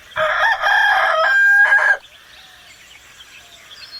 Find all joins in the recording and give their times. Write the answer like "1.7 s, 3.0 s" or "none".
none